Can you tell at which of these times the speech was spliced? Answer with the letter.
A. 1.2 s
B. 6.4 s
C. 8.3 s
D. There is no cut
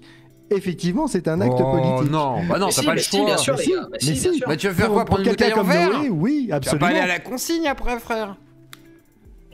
D